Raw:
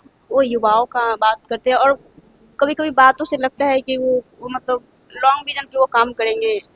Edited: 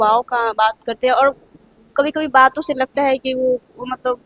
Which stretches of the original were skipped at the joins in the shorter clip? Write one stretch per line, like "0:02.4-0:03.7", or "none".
none